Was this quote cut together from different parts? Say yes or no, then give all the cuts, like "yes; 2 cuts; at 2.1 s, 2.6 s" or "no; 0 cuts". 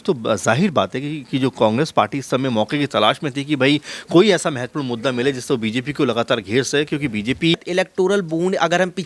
yes; 1 cut; at 7.6 s